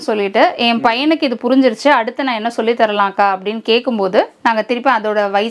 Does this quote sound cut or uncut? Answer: uncut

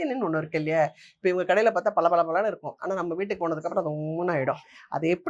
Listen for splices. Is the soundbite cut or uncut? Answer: uncut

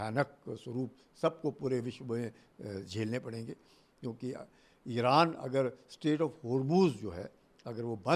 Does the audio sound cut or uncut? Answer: uncut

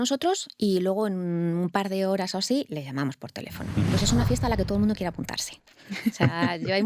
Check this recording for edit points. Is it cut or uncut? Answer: cut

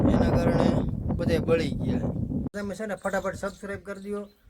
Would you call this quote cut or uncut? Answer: cut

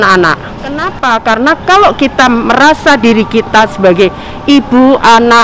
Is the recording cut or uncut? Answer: cut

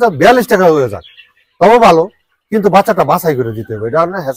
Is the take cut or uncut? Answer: uncut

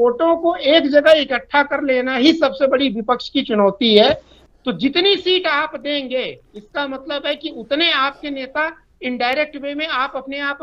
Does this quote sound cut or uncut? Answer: cut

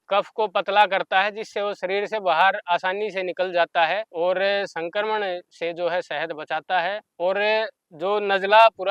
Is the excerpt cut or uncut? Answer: uncut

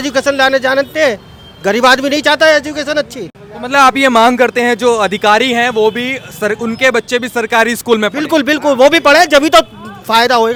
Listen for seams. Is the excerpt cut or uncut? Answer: uncut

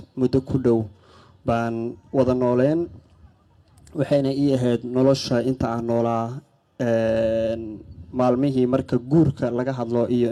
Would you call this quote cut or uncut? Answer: uncut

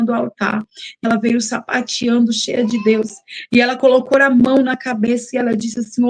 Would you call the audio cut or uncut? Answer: cut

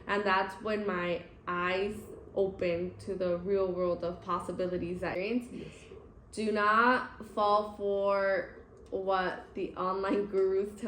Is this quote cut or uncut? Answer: cut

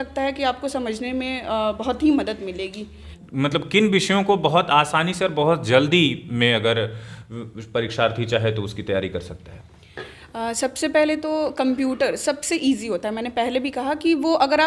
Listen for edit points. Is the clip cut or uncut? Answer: cut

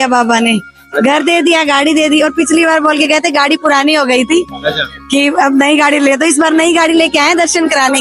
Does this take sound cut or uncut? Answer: uncut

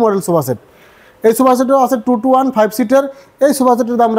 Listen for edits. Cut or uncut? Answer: uncut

